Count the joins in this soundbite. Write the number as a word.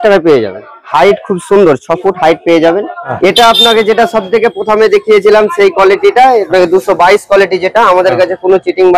two